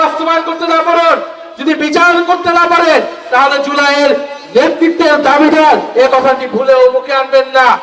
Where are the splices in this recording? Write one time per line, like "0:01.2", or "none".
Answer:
none